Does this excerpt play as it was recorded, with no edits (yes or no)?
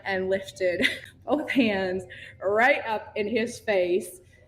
no